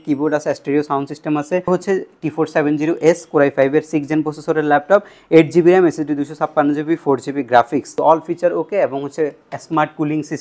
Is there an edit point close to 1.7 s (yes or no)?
yes